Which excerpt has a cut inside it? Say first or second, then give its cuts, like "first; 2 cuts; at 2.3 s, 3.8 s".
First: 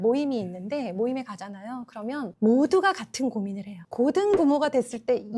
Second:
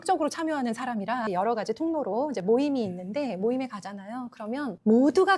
second; 1 cut; at 1.2 s